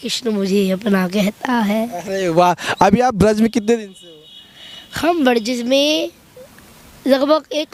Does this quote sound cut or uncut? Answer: uncut